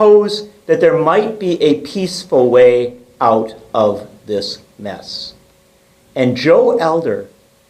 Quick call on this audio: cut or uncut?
uncut